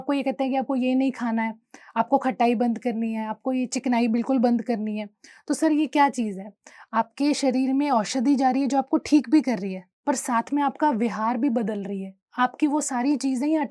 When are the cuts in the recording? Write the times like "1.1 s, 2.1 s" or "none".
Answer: none